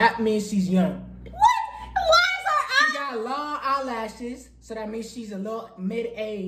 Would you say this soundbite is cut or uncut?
uncut